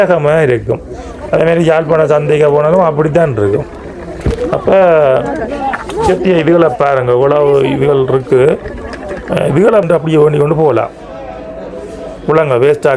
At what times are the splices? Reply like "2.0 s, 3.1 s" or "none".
9.9 s